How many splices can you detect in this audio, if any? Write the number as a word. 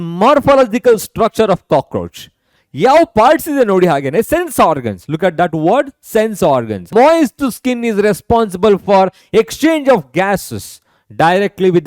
one